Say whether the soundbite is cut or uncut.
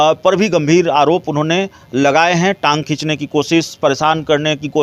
uncut